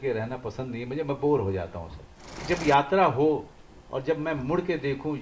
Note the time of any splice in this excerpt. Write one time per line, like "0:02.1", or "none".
0:02.4